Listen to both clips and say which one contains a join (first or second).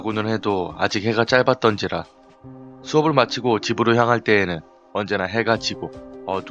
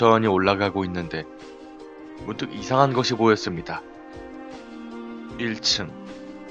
first